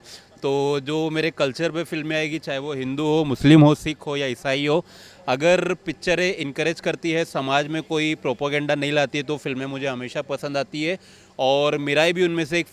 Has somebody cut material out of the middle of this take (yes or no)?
no